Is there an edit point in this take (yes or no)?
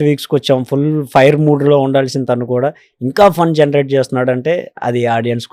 no